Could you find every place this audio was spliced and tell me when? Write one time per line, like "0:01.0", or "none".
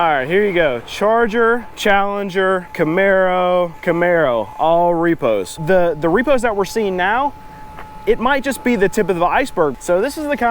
0:01.7
0:02.7
0:03.8
0:05.6
0:09.8